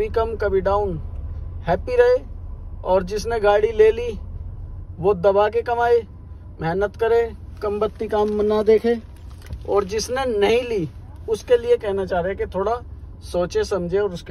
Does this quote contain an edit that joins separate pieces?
no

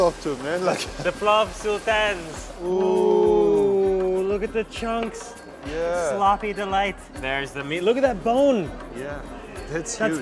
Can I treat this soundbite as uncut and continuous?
no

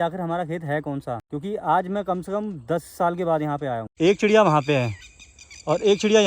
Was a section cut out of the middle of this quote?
yes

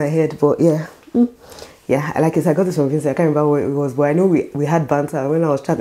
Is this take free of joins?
yes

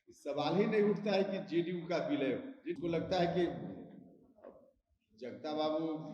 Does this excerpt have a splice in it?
yes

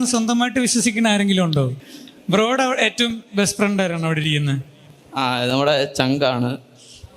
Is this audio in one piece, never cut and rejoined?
no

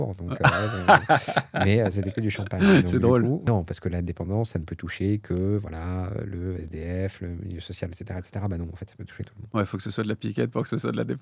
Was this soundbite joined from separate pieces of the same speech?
yes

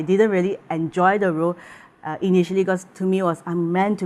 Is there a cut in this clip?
no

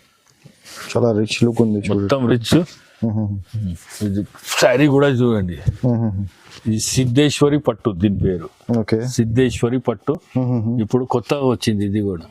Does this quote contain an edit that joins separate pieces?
no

